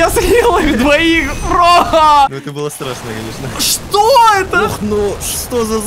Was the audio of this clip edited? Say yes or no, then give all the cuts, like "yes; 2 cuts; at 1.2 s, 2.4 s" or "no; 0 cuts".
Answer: yes; 1 cut; at 2.3 s